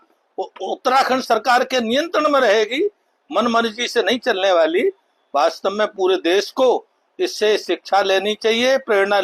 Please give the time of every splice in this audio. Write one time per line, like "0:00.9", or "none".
none